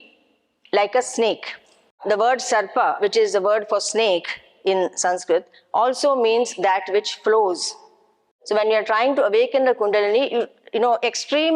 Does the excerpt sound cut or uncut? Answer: cut